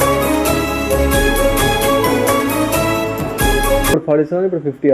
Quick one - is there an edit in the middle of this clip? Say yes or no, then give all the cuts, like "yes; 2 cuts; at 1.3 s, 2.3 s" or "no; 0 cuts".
yes; 1 cut; at 3.9 s